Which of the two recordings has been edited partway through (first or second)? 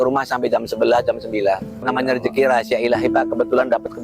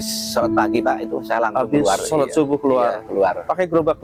first